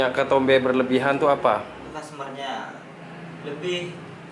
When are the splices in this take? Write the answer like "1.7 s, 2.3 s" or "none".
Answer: 1.9 s